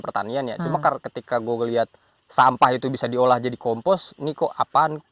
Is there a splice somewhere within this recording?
no; 0 cuts

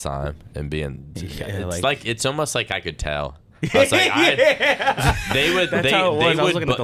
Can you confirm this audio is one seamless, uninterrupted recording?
yes; 0 cuts

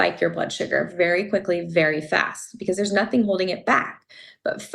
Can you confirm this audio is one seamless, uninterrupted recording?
yes; 0 cuts

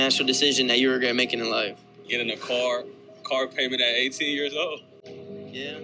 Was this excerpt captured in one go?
yes; 0 cuts

